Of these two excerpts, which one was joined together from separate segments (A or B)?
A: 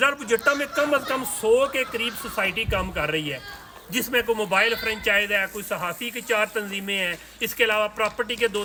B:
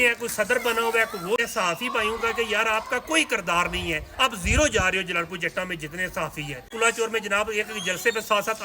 B